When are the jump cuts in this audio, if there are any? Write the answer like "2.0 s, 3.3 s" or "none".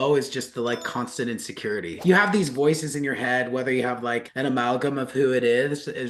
none